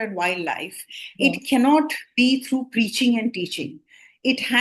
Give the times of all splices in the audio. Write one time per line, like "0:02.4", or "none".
none